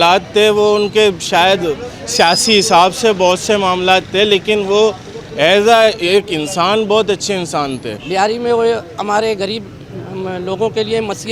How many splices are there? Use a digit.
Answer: 1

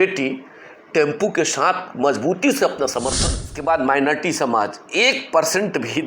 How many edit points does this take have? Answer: 1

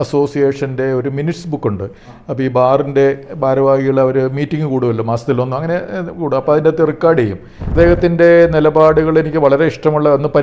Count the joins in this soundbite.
1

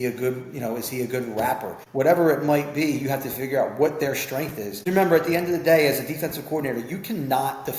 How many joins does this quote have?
2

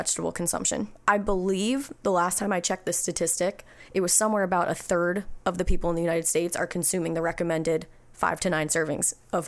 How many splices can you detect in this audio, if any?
1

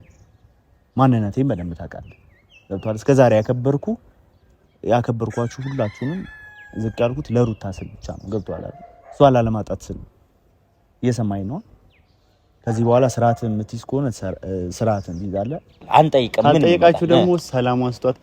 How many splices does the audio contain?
1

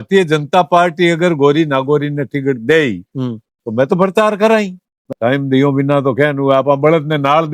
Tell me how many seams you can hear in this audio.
1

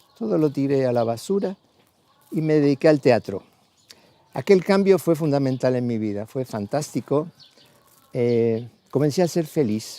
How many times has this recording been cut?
1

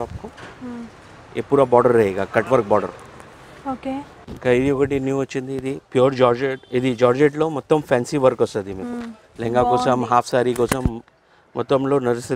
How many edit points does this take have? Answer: 1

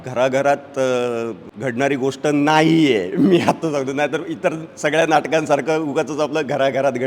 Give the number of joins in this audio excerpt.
1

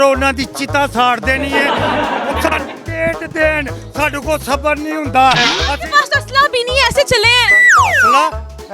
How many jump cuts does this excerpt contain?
0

